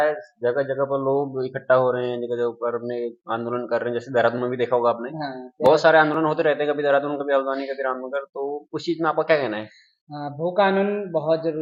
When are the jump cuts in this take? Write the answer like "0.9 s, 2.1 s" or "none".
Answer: none